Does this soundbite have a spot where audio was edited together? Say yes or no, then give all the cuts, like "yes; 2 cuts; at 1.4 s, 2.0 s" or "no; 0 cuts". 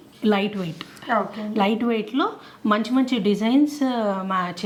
no; 0 cuts